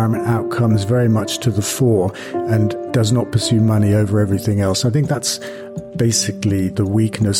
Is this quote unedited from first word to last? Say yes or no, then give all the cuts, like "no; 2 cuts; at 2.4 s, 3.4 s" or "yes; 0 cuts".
no; 1 cut; at 2.8 s